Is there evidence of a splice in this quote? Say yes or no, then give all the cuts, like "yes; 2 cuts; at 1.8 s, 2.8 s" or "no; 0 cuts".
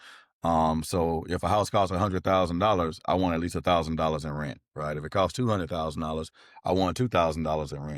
no; 0 cuts